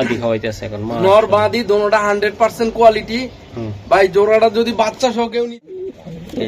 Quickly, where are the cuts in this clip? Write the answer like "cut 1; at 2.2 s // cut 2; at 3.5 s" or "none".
cut 1; at 5.4 s